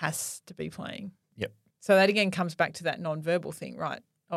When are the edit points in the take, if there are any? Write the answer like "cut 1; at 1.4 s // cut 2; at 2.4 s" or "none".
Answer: cut 1; at 1.3 s